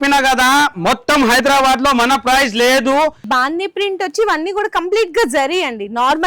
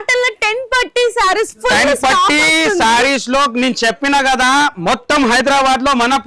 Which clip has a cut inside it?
first; 1 cut; at 3.2 s

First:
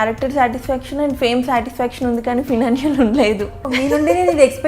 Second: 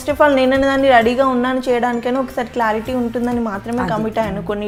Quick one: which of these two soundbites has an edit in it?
first; 1 cut; at 3.7 s

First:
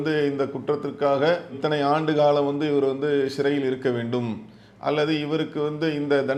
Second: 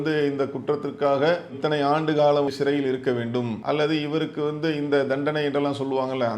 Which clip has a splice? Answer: second; 2 cuts; at 2.5 s, 3.6 s

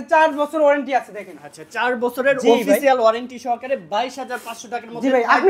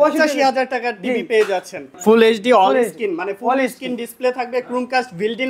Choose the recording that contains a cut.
second; 1 cut; at 1.9 s

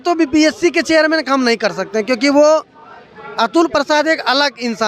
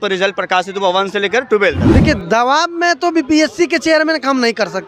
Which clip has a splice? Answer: second; 1 cut; at 1.9 s

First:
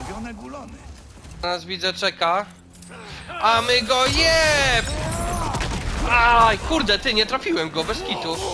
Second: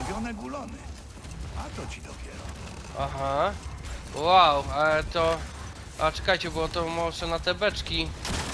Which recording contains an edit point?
first; 1 cut; at 1.4 s

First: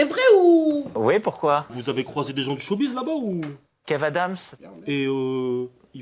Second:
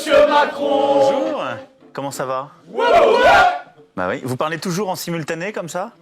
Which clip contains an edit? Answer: first; 1 cut; at 1.8 s

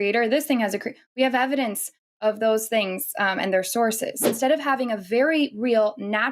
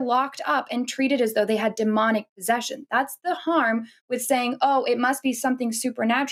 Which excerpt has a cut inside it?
first; 1 cut; at 4.3 s

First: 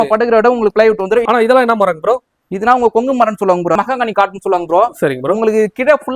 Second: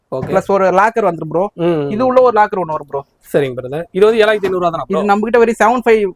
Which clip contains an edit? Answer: first; 2 cuts; at 1.2 s, 3.8 s

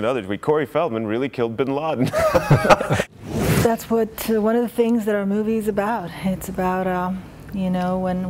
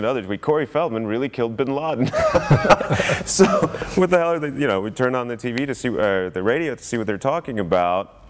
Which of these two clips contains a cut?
first; 1 cut; at 3.4 s

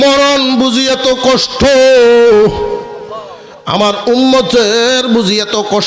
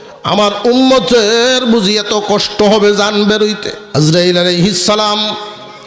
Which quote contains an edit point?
second; 1 cut; at 3.7 s

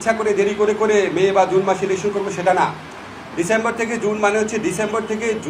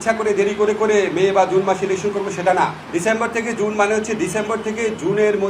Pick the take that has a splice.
second; 1 cut; at 2.8 s

